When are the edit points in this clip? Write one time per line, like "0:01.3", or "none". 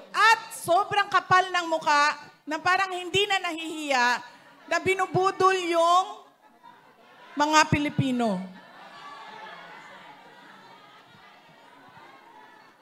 none